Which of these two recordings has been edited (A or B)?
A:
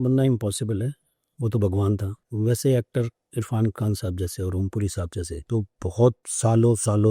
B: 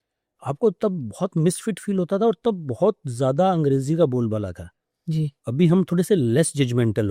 A